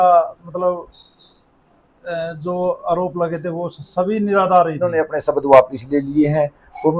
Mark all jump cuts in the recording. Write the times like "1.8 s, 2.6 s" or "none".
5.4 s